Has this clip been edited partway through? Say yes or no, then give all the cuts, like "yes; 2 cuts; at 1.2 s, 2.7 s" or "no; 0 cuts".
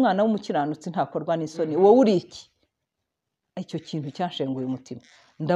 no; 0 cuts